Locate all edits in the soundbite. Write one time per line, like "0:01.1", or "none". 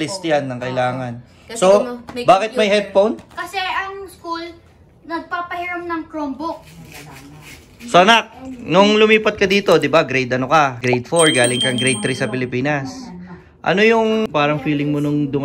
0:07.3
0:10.8
0:14.3